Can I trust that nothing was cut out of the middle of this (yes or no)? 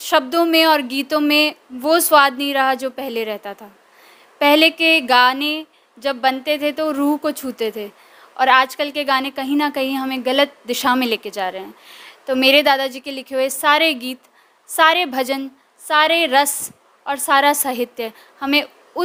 yes